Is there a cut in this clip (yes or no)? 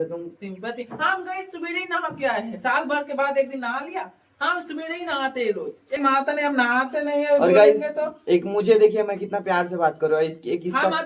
yes